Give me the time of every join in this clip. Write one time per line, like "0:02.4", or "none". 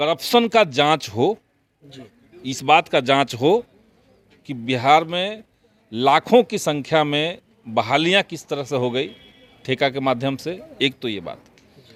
none

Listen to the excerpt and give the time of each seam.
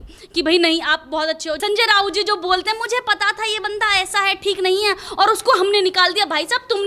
0:01.6

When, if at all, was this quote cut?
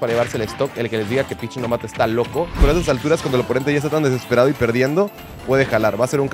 0:02.6

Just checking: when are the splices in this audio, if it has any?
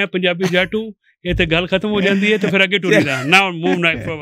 none

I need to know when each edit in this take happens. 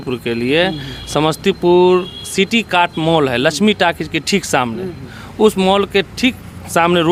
none

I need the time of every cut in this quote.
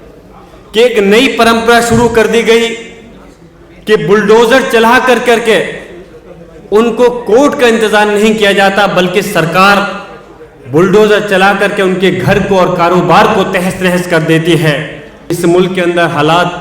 0:15.3

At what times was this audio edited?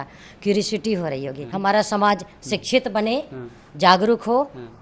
0:01.5

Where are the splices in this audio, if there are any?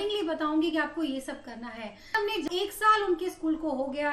0:02.4

